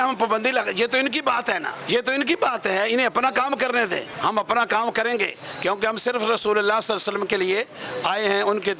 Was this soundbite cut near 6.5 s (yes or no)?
no